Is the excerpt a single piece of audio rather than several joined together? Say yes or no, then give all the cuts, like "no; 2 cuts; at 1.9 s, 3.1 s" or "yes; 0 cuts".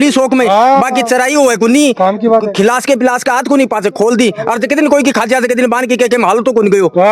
yes; 0 cuts